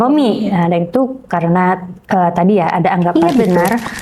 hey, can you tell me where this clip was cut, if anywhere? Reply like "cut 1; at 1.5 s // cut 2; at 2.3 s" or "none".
cut 1; at 3.1 s